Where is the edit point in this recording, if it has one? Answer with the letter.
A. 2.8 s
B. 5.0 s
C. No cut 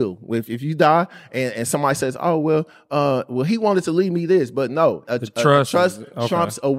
B